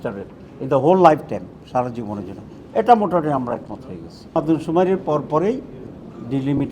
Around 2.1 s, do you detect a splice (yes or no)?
no